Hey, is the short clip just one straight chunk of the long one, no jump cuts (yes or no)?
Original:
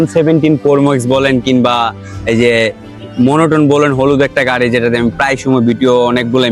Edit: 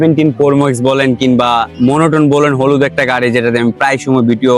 no